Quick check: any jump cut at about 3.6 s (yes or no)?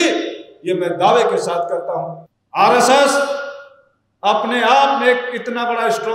no